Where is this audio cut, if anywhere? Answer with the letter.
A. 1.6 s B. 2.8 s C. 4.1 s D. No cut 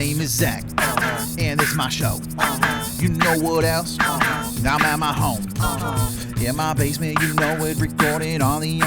C